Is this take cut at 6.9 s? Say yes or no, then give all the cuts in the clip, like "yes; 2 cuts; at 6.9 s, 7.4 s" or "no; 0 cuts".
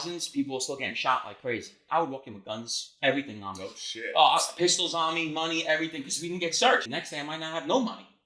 yes; 2 cuts; at 1.8 s, 6.9 s